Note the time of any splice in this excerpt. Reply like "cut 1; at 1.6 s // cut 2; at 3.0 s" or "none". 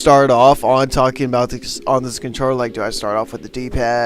cut 1; at 1.5 s